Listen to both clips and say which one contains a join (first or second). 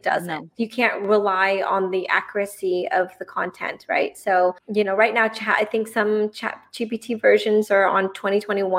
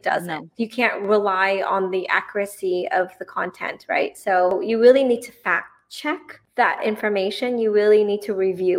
second